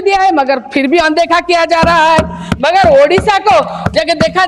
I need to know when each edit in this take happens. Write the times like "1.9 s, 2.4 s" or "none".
none